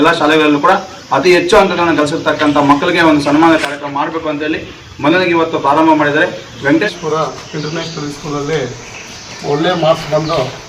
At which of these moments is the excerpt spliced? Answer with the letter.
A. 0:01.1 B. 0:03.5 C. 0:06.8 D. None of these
C